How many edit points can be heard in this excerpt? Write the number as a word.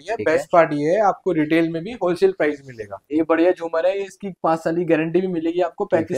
one